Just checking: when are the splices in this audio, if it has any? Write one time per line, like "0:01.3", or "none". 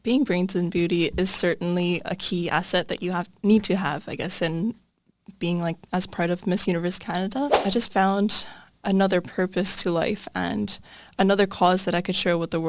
0:07.6